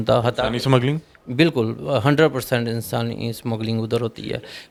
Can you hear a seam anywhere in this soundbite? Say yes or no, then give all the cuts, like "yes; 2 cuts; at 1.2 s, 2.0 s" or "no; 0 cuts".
no; 0 cuts